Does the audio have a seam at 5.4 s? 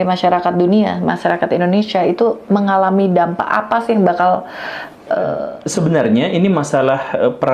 yes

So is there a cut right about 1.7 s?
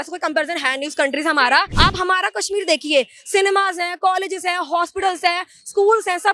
yes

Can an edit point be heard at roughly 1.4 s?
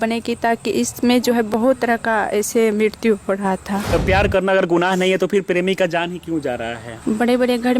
no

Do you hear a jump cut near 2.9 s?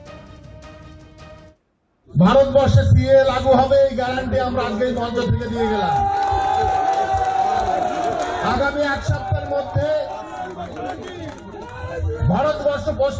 no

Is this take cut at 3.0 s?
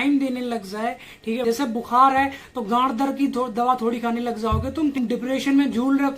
no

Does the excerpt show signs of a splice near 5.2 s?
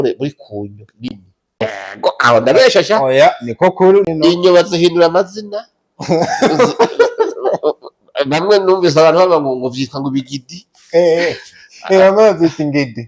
no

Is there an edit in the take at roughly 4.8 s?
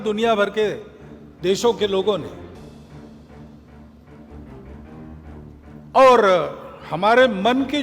yes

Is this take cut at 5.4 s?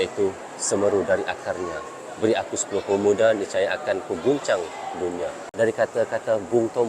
yes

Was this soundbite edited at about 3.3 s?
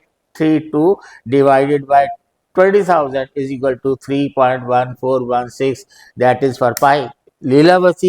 no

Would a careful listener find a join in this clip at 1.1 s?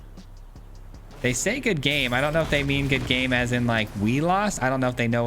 yes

